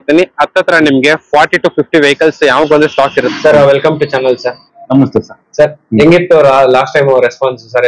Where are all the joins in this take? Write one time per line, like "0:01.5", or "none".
0:03.3